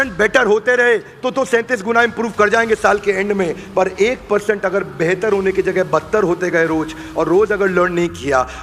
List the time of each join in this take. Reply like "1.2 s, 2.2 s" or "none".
none